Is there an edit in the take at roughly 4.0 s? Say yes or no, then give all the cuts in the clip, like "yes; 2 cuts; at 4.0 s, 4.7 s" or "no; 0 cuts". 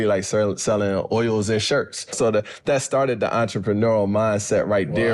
no; 1 cut; at 2.1 s